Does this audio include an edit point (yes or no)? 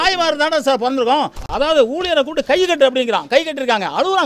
yes